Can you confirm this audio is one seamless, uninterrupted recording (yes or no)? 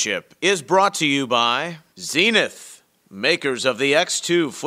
no